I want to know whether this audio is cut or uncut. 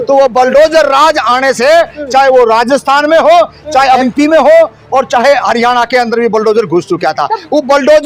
cut